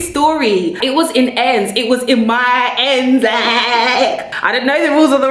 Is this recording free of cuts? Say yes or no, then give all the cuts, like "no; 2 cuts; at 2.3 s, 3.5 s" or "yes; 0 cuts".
no; 2 cuts; at 0.8 s, 4.2 s